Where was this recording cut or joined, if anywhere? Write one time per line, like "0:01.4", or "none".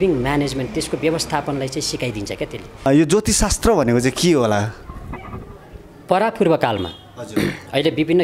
0:02.8